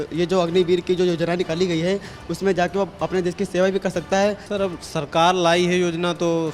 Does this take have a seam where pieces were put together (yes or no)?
yes